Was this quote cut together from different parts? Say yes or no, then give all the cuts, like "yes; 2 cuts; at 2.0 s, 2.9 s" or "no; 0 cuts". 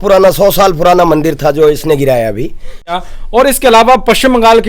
yes; 1 cut; at 2.9 s